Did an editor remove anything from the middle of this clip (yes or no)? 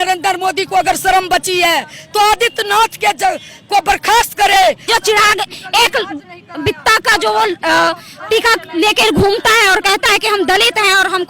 yes